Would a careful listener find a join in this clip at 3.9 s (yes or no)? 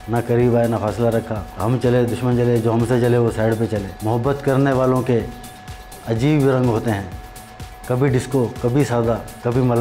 yes